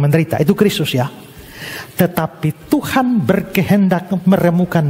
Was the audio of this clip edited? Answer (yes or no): no